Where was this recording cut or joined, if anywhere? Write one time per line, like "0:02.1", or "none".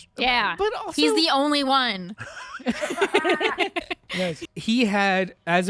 0:04.4